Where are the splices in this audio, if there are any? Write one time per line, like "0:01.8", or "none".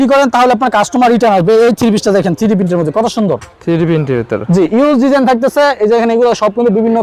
none